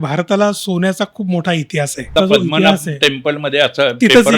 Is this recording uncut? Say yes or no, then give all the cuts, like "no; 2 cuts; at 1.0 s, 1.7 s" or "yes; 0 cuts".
no; 1 cut; at 2.1 s